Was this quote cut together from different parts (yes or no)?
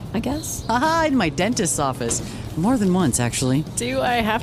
no